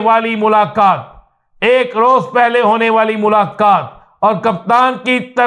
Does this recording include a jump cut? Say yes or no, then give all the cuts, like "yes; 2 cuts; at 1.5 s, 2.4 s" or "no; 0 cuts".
no; 0 cuts